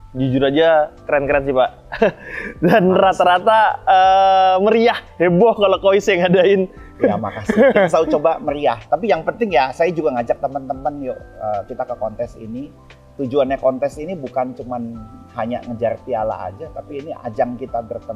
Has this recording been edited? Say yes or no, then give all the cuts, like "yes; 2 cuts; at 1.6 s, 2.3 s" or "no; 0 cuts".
no; 0 cuts